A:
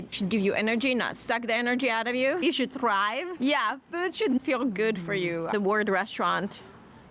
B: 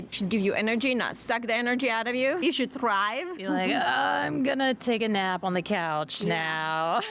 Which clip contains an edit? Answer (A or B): A